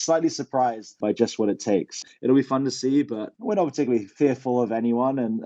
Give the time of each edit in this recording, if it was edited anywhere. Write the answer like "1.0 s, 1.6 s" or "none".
0.9 s, 2.0 s, 3.2 s